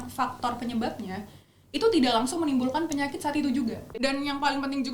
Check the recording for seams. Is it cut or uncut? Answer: cut